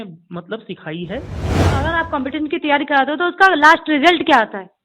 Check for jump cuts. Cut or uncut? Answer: cut